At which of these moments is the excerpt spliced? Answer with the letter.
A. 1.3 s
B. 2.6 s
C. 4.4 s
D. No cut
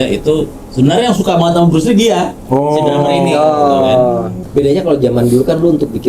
C